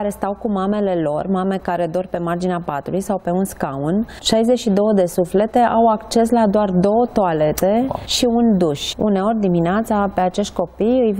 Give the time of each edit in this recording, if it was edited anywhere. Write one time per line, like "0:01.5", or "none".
0:04.2
0:08.0
0:08.9